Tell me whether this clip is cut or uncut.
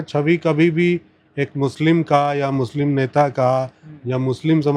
uncut